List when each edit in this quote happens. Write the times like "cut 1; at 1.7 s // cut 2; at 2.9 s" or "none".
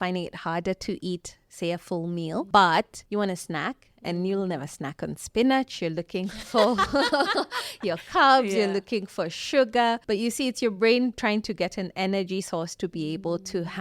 cut 1; at 2.5 s // cut 2; at 3.0 s // cut 3; at 10.0 s